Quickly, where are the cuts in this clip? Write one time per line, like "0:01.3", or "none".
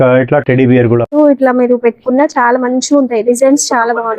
0:01.1